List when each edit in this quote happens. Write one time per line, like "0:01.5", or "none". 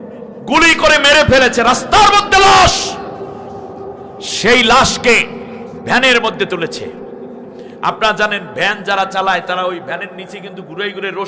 none